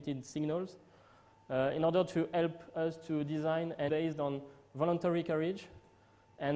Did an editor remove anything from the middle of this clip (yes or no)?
no